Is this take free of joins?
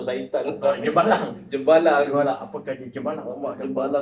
yes; 0 cuts

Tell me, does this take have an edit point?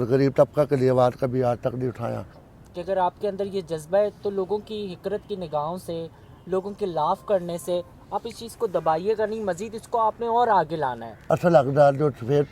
yes; 2 cuts; at 2.5 s, 11.1 s

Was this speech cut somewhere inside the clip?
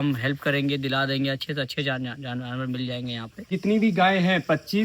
yes; 1 cut; at 3.5 s

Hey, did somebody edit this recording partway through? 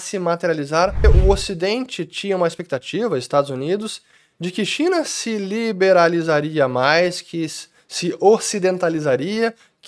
yes; 1 cut; at 1.0 s

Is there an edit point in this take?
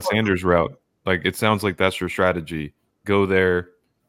no; 0 cuts

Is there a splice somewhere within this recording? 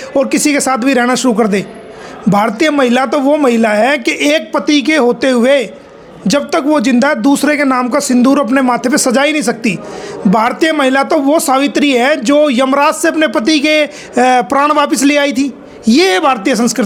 no; 0 cuts

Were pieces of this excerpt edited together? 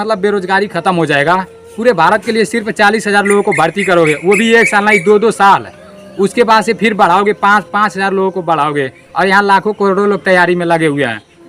no; 0 cuts

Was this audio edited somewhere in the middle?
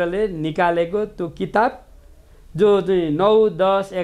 no; 0 cuts

